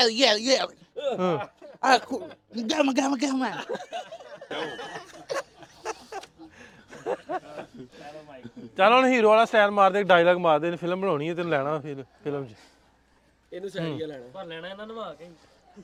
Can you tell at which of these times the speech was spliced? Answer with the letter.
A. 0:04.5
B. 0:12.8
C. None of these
C